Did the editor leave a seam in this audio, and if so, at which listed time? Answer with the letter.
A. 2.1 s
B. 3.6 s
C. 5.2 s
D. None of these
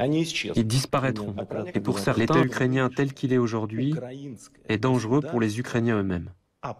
A